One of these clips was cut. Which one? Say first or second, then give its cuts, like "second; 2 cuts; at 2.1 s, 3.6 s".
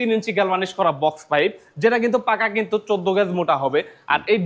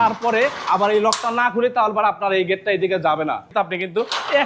second; 1 cut; at 3.5 s